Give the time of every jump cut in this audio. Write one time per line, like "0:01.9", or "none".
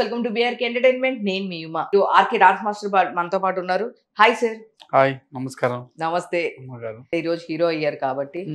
0:01.9
0:07.1

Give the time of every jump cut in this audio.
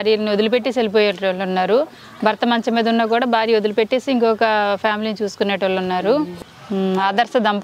0:06.3

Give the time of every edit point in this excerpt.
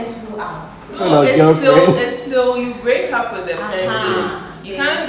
0:01.0

